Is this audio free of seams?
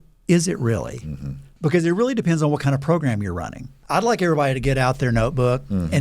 no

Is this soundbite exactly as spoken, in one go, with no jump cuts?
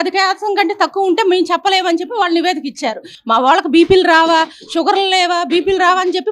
no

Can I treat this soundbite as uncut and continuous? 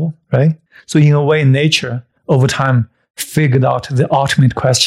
yes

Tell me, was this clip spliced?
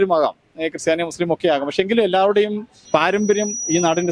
yes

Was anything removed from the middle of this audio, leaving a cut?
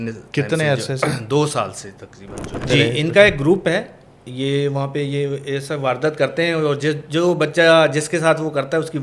yes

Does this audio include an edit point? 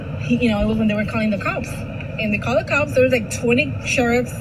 no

